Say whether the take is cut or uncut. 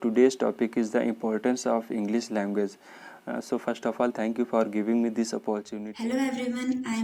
cut